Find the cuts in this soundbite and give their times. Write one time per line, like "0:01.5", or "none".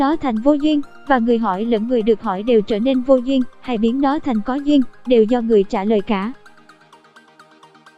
0:06.4